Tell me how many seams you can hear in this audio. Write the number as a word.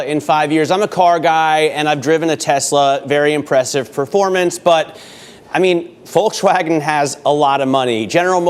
zero